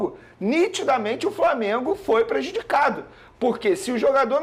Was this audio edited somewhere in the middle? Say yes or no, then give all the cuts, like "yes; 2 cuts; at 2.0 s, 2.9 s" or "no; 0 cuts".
no; 0 cuts